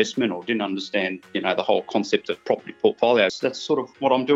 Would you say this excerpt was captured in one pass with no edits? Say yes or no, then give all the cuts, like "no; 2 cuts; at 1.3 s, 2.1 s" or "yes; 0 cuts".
no; 1 cut; at 3.3 s